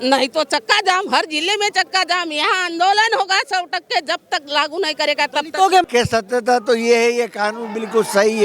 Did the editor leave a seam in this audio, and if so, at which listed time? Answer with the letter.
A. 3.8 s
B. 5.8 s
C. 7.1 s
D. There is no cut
B